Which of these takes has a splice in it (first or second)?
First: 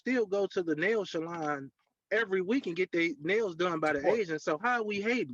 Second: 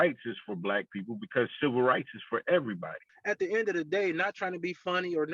second